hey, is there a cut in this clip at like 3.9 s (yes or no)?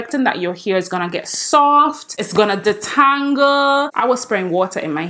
yes